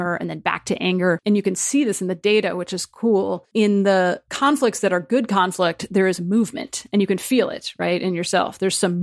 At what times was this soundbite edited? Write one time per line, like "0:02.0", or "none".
0:01.2
0:03.4
0:04.3